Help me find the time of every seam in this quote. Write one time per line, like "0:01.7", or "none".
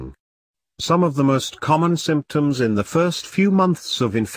none